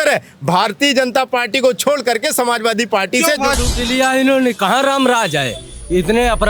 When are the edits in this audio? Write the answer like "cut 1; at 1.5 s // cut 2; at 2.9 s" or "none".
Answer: cut 1; at 3.6 s